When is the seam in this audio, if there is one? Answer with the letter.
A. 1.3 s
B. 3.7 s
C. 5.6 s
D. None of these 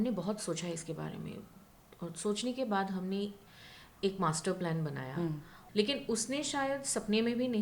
C